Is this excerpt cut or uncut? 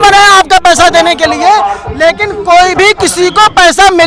uncut